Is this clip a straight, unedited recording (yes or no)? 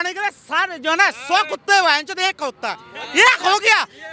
yes